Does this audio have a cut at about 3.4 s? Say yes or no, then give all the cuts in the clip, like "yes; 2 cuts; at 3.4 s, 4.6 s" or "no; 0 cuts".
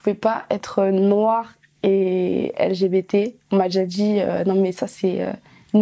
no; 0 cuts